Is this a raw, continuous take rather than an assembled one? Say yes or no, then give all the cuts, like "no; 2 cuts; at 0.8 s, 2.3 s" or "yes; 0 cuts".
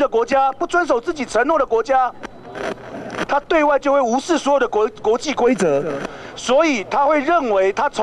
yes; 0 cuts